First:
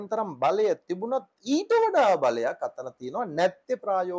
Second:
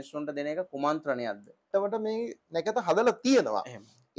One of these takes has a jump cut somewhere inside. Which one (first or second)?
second